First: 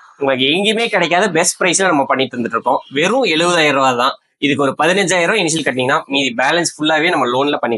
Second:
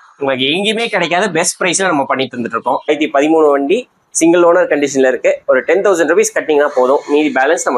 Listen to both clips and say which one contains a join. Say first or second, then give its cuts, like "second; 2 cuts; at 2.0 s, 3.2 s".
second; 1 cut; at 2.9 s